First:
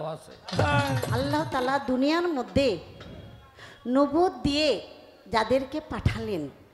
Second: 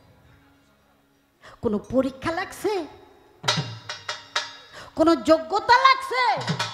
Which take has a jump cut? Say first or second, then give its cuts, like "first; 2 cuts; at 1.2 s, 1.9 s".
first; 1 cut; at 1.1 s